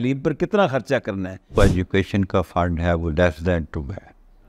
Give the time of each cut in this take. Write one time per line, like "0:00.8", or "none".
0:01.6